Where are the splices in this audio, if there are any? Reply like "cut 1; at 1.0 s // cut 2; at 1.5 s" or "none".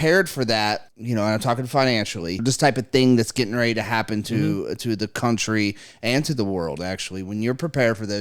cut 1; at 0.9 s // cut 2; at 2.4 s